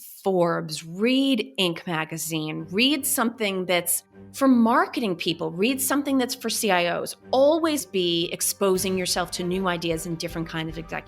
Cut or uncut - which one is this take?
uncut